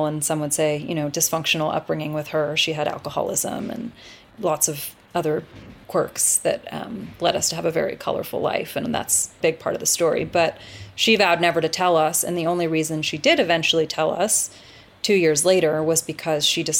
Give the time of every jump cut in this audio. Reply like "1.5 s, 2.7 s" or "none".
4.2 s, 5.8 s, 9.3 s

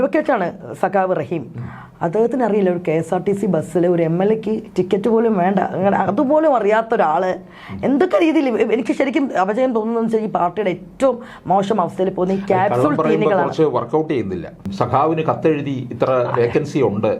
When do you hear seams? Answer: 14.7 s

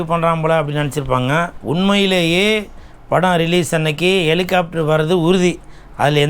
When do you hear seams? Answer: 1.6 s

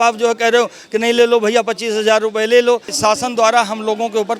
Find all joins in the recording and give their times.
2.9 s

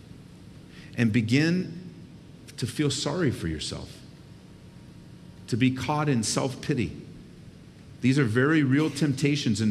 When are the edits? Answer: none

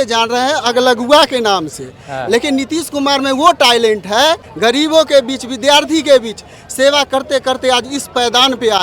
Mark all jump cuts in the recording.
4.5 s

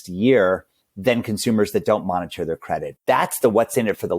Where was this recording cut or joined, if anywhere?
2.9 s

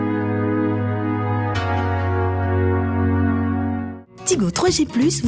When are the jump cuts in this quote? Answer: 3.8 s

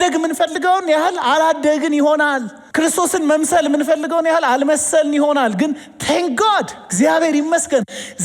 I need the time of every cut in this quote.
2.6 s

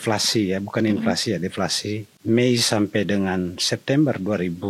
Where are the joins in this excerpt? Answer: 2.1 s

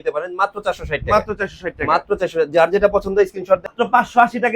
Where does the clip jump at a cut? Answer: 3.6 s

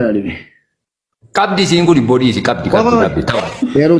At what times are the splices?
none

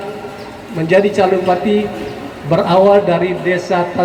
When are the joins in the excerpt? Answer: none

